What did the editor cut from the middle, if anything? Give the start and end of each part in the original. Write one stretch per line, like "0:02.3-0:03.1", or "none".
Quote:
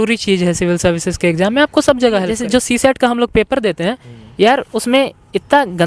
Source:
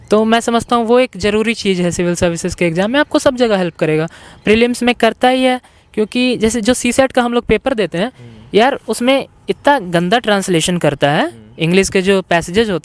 0:03.7-0:06.5